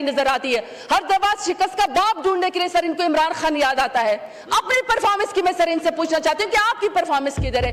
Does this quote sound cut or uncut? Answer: uncut